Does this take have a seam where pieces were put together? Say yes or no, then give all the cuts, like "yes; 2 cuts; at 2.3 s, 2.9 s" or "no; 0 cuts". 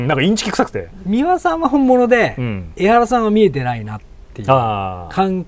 yes; 1 cut; at 1.0 s